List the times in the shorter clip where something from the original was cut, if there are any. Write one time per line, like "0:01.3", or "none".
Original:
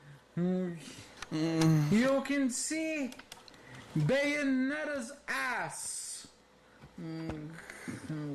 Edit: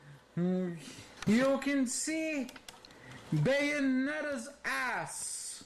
0:01.2